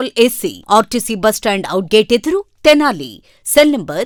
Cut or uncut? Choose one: uncut